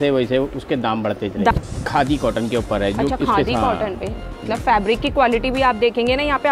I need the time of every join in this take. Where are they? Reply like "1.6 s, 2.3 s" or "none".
1.5 s, 4.3 s